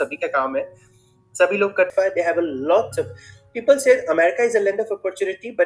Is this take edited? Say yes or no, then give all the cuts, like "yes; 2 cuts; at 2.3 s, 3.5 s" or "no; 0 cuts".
yes; 1 cut; at 1.9 s